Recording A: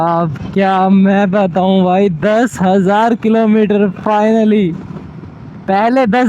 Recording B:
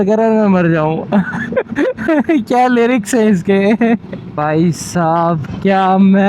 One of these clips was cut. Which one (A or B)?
B